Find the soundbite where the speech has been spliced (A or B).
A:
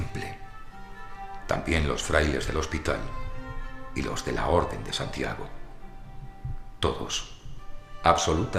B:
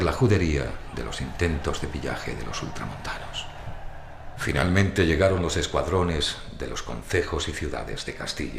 A